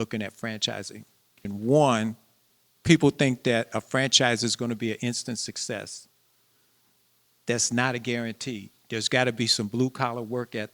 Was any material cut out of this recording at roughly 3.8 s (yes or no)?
no